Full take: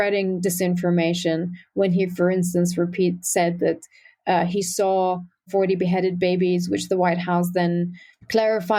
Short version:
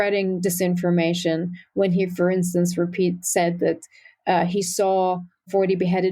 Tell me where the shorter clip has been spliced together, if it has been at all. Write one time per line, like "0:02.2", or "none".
none